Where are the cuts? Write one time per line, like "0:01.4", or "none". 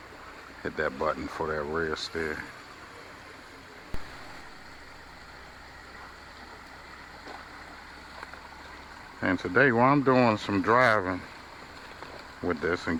none